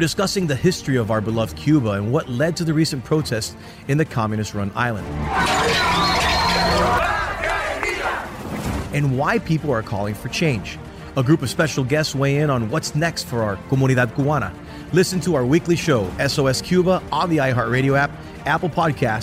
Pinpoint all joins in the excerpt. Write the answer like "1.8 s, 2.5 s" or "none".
none